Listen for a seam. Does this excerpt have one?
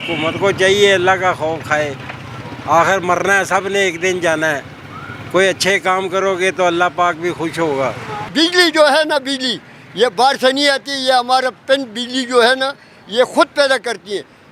no; 0 cuts

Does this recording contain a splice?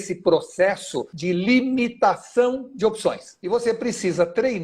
yes; 2 cuts; at 1.1 s, 3.3 s

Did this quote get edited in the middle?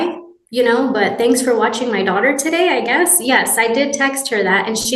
no; 0 cuts

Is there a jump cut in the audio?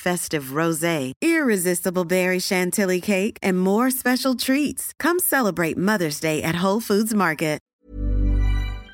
yes; 1 cut; at 7.7 s

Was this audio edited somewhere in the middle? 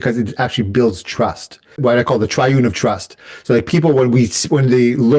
yes; 1 cut; at 1.8 s

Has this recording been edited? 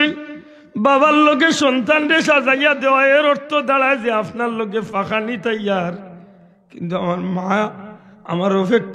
no; 0 cuts

